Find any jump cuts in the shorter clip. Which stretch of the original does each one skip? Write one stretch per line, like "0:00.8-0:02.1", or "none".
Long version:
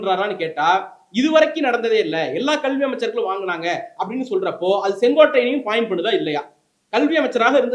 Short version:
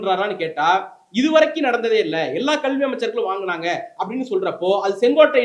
none